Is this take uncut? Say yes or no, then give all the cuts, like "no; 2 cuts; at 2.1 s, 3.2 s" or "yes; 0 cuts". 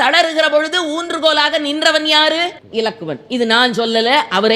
yes; 0 cuts